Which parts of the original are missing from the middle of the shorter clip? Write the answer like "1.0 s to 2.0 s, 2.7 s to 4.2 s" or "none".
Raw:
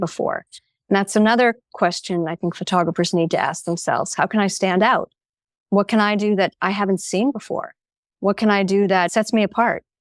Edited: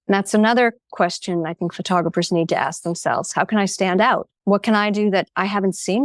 5.1 s to 5.6 s